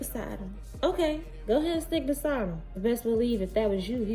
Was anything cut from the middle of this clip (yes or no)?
yes